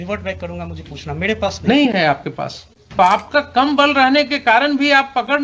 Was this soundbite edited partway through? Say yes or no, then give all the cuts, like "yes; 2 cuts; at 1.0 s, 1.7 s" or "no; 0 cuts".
yes; 1 cut; at 3.0 s